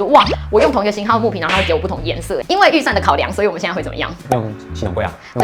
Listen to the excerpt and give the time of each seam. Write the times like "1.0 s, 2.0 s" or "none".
2.4 s